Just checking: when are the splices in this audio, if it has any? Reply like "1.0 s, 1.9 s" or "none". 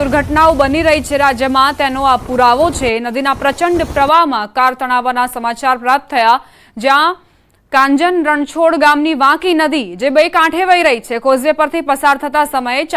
5.3 s